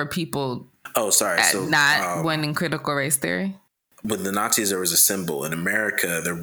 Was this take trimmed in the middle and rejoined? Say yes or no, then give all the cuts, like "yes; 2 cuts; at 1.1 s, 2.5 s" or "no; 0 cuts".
yes; 1 cut; at 3.9 s